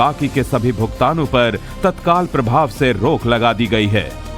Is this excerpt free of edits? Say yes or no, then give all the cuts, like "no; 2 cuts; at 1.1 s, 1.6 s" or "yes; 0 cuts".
yes; 0 cuts